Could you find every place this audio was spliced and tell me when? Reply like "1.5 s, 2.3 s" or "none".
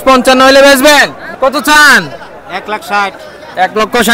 1.2 s